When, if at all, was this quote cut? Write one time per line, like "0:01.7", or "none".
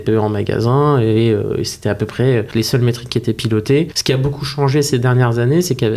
0:02.5
0:04.0